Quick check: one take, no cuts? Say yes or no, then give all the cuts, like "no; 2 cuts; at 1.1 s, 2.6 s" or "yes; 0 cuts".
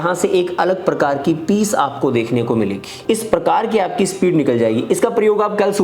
no; 1 cut; at 2.9 s